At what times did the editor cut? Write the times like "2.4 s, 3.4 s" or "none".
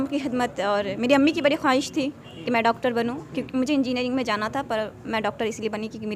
none